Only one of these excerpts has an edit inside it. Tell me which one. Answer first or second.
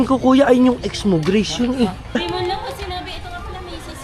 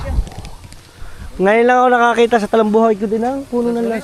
first